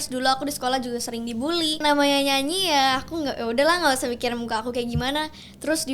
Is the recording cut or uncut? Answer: cut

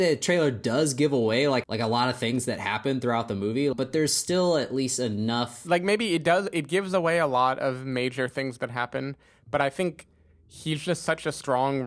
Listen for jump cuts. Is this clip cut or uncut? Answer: cut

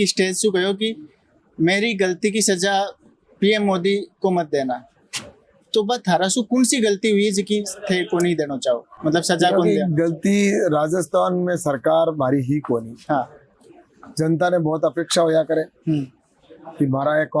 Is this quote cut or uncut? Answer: uncut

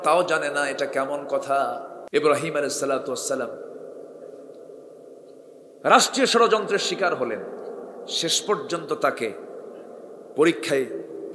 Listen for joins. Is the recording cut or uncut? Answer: cut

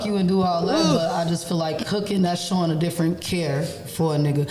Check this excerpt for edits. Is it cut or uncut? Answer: uncut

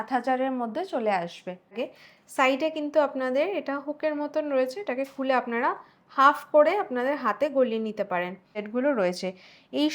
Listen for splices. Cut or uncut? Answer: cut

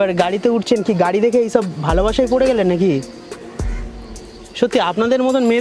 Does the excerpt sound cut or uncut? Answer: uncut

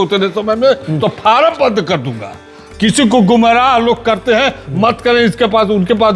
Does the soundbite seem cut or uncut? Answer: uncut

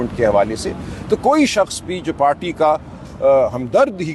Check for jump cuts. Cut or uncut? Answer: uncut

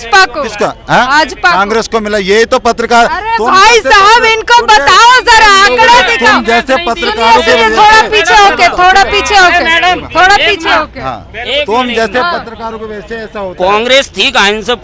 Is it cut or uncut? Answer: uncut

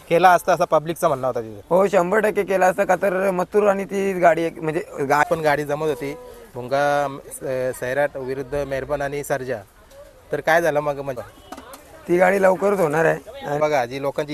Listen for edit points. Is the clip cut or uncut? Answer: cut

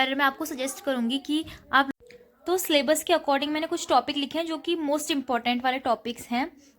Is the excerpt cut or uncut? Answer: cut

